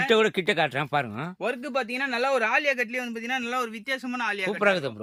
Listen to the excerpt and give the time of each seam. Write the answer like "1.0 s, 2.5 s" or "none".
none